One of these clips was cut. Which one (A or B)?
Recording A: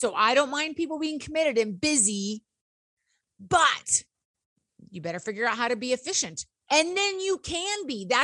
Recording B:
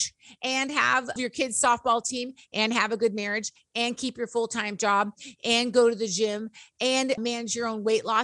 B